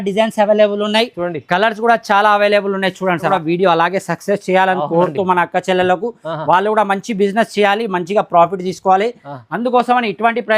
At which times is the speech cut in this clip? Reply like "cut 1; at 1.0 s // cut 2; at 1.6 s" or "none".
cut 1; at 3.3 s